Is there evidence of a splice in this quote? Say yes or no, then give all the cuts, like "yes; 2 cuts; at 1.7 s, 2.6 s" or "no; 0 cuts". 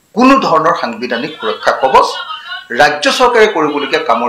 no; 0 cuts